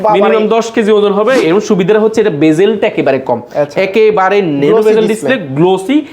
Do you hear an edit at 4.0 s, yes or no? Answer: no